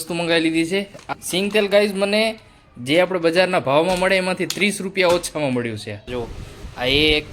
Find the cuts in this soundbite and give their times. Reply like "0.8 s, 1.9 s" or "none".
1.0 s, 6.0 s